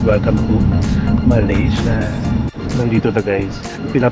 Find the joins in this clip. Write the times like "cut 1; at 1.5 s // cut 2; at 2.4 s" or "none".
cut 1; at 2.4 s